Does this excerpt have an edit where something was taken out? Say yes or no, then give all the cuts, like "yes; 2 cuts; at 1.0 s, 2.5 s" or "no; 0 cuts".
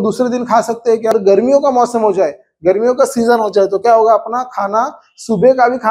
yes; 1 cut; at 1.1 s